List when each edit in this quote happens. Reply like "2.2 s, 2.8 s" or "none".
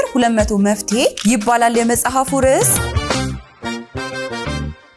2.8 s